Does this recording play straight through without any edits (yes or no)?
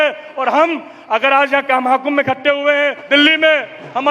no